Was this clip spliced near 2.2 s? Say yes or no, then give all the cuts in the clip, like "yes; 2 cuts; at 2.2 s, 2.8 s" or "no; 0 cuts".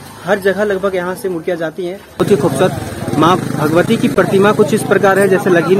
yes; 1 cut; at 2.2 s